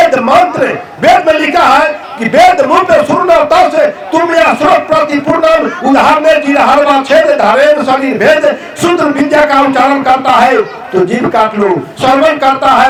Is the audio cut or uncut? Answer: uncut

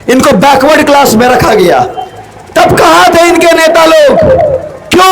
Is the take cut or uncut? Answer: uncut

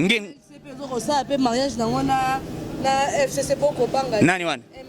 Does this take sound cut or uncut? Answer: uncut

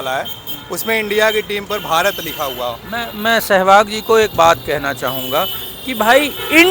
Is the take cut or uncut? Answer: uncut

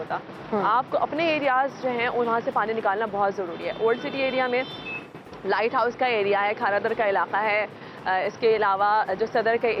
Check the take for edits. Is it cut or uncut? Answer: uncut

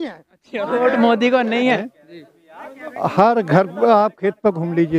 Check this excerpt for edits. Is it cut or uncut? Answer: cut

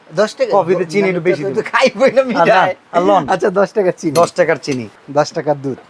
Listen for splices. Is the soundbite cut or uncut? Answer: cut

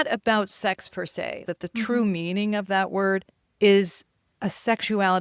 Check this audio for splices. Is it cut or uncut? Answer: cut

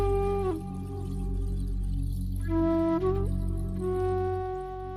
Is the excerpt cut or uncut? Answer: uncut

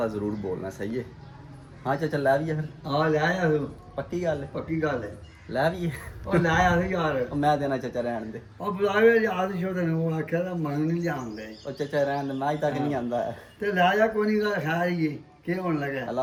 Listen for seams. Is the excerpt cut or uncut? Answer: uncut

